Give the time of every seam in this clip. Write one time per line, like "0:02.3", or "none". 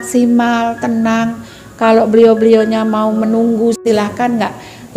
0:03.8